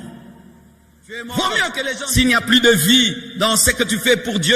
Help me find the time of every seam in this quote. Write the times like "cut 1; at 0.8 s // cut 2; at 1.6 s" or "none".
cut 1; at 2.0 s